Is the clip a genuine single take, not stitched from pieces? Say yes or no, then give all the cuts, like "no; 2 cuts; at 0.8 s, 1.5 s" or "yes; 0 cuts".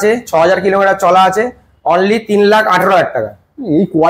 yes; 0 cuts